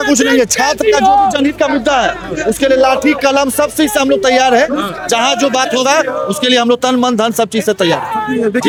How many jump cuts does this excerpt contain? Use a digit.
0